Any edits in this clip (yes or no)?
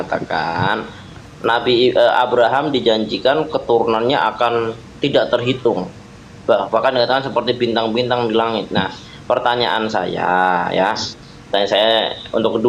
no